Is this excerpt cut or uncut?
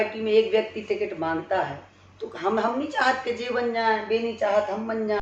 uncut